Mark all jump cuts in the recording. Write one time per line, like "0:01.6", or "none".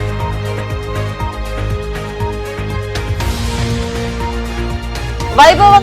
0:03.1